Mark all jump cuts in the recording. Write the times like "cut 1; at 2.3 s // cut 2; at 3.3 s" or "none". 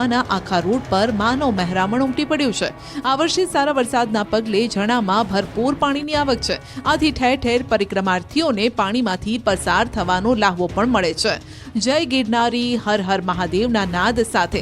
cut 1; at 2.1 s